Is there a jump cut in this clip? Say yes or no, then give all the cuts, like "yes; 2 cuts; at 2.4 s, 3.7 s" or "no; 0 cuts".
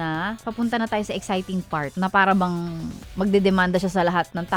no; 0 cuts